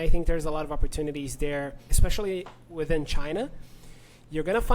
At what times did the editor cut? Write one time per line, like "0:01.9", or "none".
0:01.8